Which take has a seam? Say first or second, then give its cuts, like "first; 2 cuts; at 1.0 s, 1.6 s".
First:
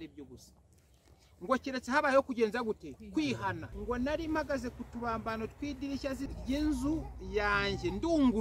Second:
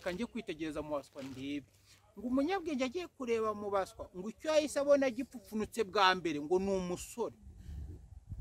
first; 2 cuts; at 3.7 s, 6.2 s